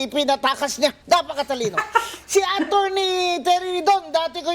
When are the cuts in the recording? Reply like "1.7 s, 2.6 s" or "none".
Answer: 1.0 s